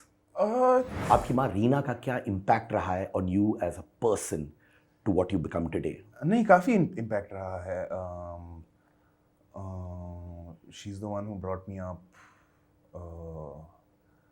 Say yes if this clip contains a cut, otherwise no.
yes